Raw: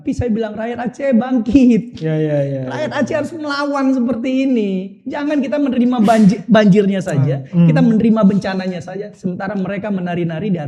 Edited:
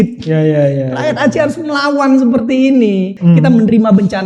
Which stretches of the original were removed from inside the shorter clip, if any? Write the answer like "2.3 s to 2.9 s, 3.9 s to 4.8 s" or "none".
4.9 s to 7.4 s